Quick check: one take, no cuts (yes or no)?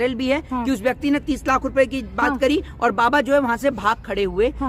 yes